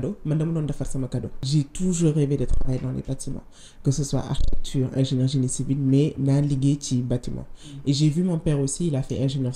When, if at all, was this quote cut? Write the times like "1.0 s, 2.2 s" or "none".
1.5 s